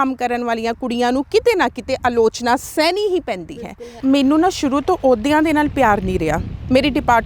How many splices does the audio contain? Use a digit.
1